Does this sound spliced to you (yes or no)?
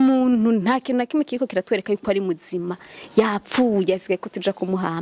no